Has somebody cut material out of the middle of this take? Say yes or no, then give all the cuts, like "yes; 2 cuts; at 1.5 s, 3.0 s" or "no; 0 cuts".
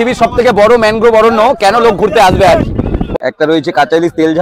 yes; 1 cut; at 3.2 s